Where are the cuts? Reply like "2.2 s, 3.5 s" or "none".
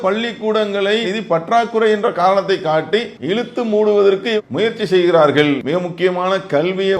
3.2 s